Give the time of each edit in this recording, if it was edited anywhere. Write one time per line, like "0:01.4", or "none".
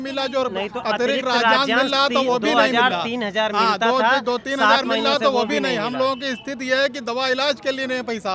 none